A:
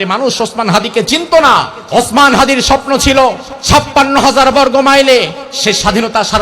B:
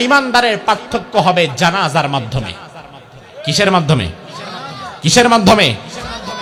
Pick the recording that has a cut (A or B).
A